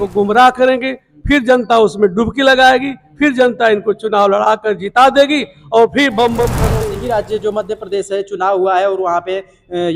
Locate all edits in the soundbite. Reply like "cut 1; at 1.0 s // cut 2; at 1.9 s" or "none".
cut 1; at 6.6 s